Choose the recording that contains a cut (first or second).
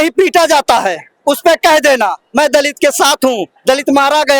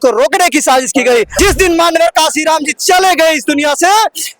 second